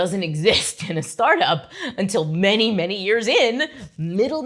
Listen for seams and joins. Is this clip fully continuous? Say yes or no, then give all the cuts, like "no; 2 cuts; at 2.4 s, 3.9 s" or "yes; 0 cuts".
yes; 0 cuts